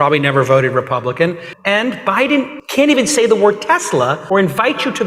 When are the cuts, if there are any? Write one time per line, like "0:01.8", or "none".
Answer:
0:01.5
0:02.6
0:04.2